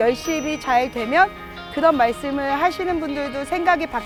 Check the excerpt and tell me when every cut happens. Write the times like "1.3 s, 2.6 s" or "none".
none